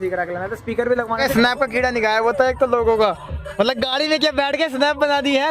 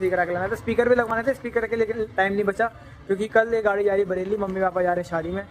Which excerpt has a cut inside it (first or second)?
first